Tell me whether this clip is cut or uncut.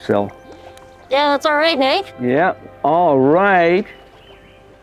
uncut